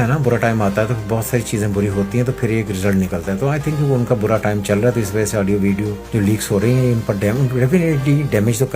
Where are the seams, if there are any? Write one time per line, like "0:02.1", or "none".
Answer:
0:06.0